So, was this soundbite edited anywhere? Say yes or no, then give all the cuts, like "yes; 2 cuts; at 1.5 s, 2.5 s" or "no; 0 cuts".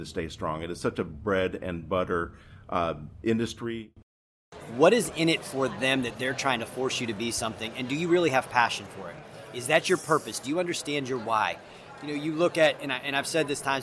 yes; 1 cut; at 4.5 s